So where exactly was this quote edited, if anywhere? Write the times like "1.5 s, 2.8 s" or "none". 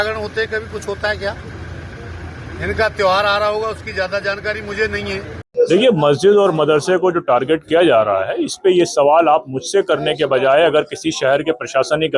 5.4 s